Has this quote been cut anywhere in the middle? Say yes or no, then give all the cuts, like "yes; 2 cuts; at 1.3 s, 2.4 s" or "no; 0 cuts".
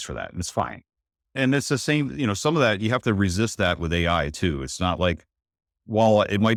no; 0 cuts